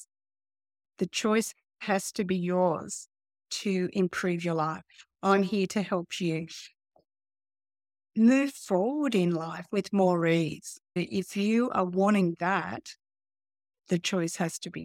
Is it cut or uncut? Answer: cut